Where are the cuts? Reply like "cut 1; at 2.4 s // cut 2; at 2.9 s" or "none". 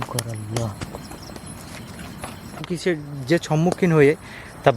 cut 1; at 2.7 s